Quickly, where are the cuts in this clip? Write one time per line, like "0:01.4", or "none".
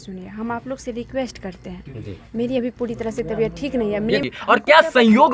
0:04.3